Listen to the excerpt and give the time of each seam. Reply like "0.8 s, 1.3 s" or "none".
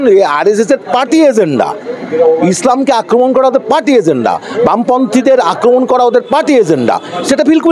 none